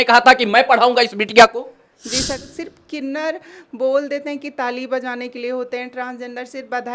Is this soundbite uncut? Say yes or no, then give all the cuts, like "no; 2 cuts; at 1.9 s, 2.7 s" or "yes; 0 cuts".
no; 1 cut; at 2.4 s